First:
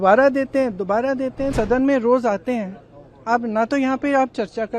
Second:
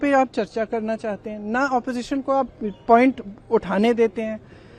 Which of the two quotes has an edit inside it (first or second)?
first